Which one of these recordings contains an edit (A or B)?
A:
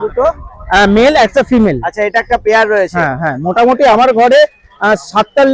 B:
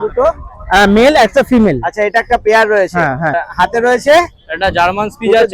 B